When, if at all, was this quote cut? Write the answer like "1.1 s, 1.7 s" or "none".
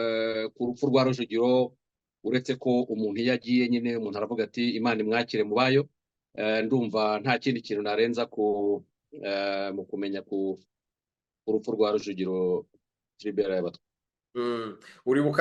none